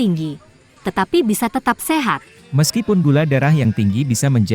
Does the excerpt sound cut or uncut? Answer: uncut